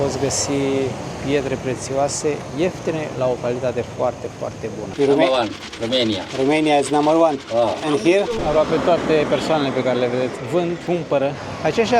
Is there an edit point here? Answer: yes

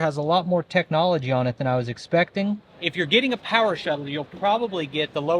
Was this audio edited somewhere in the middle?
yes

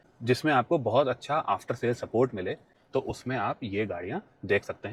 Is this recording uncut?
yes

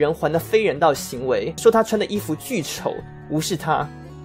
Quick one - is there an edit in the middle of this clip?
yes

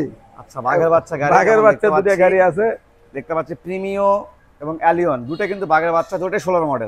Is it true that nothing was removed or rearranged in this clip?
yes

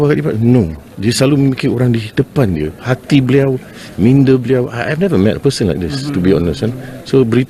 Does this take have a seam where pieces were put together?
no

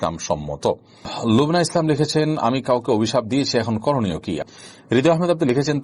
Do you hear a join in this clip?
yes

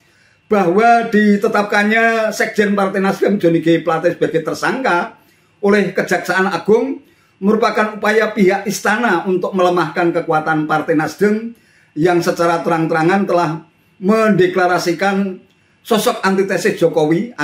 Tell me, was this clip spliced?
no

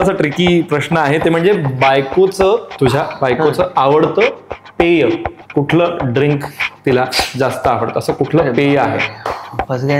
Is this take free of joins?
no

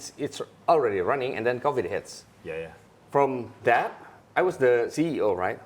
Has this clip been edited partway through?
yes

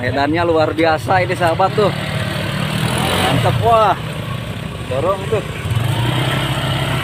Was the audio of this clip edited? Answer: no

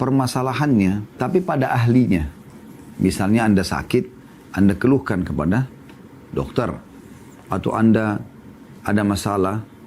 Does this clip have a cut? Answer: yes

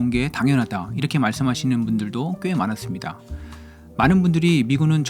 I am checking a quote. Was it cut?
no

